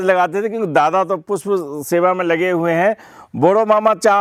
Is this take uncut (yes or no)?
yes